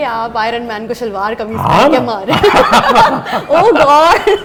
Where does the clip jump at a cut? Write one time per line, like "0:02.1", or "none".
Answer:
none